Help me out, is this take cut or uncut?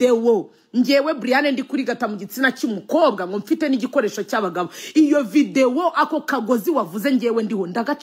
uncut